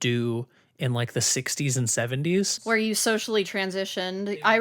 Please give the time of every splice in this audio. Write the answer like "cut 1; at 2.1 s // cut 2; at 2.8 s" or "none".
cut 1; at 2.6 s